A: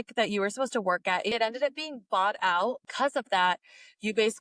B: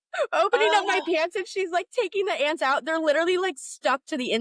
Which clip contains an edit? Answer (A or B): A